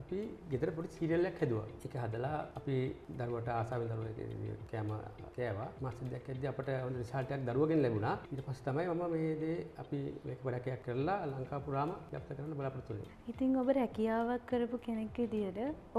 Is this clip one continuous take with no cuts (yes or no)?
yes